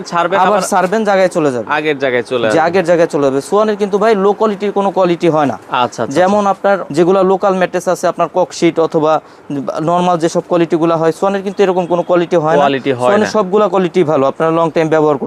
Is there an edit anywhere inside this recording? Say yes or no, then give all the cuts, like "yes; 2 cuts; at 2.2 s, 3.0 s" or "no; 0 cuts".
no; 0 cuts